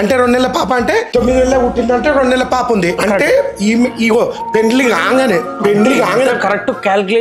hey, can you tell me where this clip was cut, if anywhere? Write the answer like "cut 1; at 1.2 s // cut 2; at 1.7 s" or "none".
none